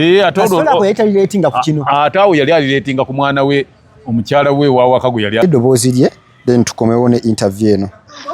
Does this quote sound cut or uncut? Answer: cut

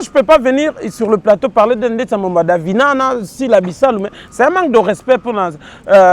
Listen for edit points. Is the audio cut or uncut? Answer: uncut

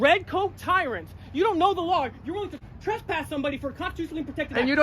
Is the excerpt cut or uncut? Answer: cut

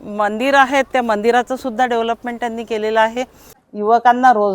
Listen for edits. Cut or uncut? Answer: cut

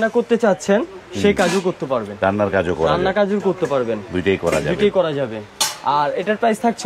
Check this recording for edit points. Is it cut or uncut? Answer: uncut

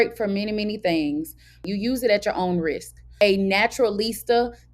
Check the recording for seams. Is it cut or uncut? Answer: cut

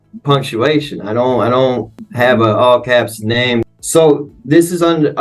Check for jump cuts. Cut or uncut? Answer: cut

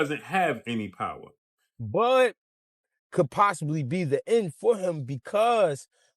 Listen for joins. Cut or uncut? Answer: cut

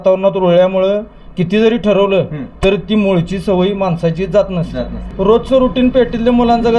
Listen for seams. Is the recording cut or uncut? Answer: cut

